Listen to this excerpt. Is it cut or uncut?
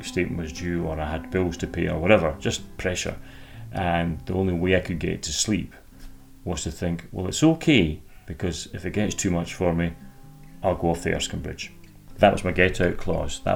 cut